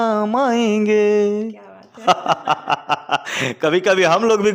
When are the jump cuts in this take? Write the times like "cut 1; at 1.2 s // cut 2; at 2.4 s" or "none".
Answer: none